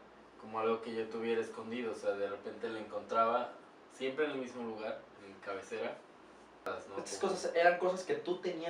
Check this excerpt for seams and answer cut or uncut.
cut